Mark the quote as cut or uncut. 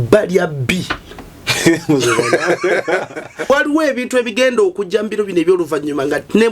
cut